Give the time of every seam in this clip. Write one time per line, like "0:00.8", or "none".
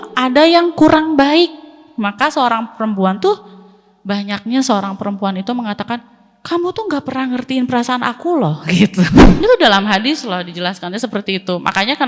0:09.2